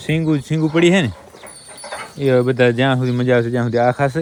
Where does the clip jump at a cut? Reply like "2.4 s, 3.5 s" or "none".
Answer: none